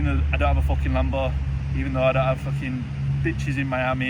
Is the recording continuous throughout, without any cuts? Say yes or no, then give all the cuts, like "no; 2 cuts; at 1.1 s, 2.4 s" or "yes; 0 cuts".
yes; 0 cuts